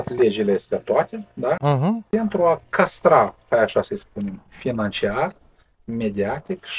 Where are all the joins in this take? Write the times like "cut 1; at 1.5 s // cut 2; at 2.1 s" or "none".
none